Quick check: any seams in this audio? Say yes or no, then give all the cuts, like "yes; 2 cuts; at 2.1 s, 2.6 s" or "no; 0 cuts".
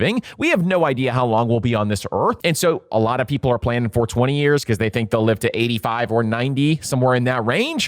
yes; 1 cut; at 2.4 s